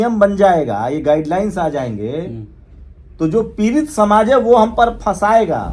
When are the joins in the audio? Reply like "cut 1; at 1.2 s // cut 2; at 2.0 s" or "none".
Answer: none